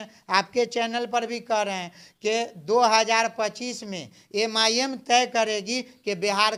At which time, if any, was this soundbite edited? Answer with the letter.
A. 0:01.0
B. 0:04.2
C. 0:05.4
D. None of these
D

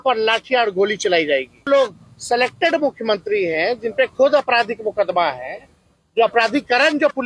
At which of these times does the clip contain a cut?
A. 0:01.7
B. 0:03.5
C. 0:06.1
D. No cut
A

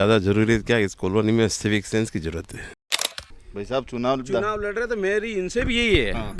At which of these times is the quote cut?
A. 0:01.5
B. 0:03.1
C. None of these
B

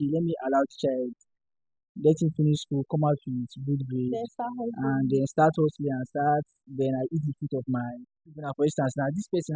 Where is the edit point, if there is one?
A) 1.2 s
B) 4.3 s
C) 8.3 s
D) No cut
C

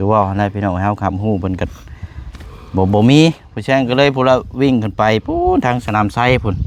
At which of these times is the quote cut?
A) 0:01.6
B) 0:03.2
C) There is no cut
C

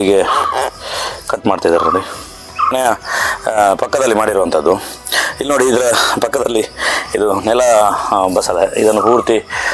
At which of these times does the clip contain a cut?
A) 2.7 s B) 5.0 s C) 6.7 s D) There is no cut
A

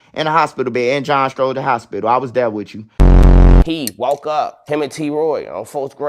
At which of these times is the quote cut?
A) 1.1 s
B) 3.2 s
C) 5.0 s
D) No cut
B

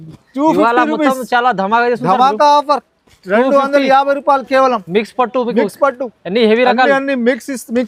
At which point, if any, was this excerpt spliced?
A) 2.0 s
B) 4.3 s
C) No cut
C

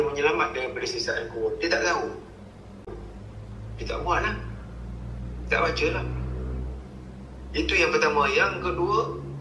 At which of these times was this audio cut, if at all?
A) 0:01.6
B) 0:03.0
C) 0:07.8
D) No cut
B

